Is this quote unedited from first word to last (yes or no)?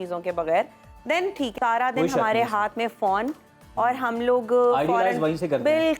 no